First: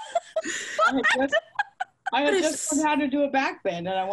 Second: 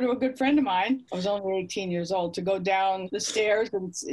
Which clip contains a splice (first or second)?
second